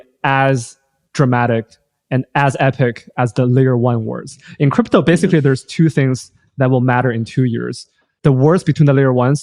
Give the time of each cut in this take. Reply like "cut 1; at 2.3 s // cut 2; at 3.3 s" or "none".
none